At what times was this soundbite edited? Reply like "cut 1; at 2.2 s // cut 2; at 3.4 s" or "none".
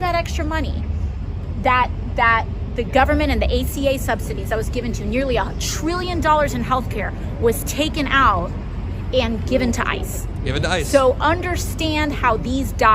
none